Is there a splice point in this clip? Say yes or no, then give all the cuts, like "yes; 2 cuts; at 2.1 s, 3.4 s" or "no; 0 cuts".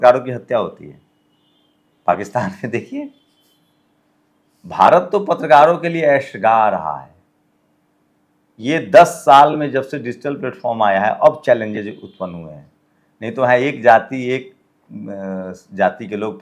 no; 0 cuts